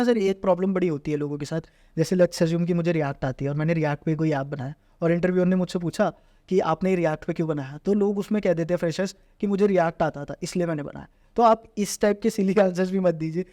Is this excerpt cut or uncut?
uncut